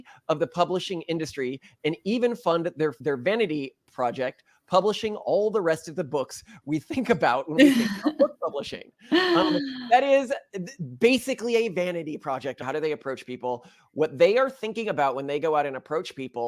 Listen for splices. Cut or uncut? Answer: cut